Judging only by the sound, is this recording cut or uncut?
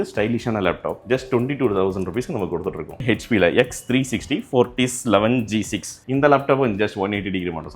cut